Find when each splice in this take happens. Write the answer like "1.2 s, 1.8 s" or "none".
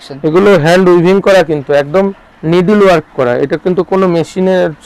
none